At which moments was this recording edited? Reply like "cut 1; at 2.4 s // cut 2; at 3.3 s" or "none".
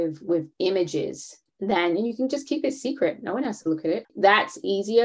none